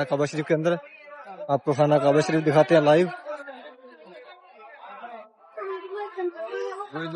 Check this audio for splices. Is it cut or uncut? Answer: uncut